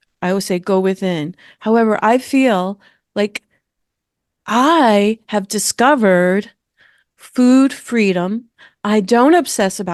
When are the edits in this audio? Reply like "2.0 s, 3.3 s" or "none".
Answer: none